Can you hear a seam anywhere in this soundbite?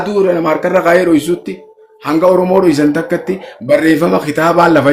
no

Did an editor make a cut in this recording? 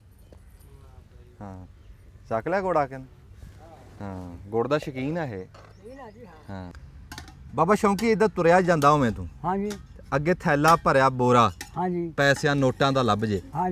yes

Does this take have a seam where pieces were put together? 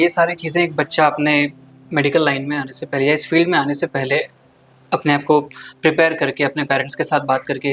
no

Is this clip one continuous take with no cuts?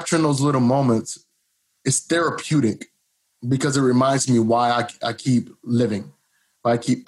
yes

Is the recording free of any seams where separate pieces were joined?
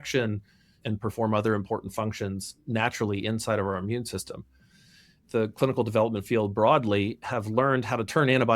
no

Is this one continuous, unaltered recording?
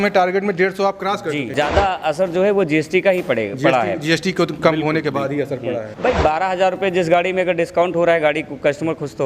no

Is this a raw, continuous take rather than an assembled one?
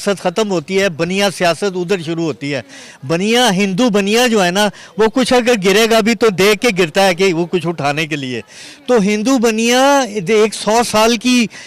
yes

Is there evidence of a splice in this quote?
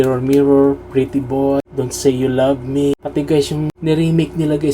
yes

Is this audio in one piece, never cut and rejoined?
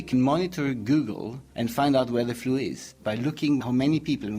no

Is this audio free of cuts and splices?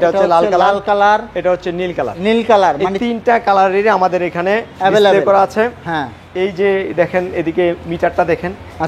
yes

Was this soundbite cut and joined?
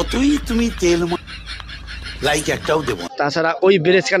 yes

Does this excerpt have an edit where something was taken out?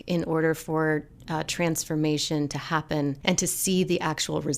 yes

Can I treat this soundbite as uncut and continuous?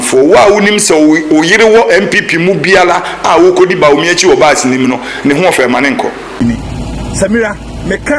no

